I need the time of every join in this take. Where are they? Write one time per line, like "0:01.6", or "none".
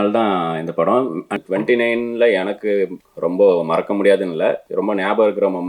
0:01.4
0:03.0
0:04.7